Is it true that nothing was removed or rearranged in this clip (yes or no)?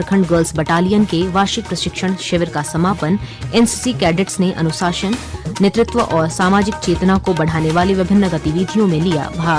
yes